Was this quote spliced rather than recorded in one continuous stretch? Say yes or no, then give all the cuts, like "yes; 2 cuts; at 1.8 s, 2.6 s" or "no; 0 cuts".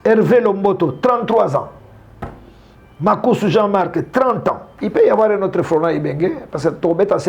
yes; 1 cut; at 4.7 s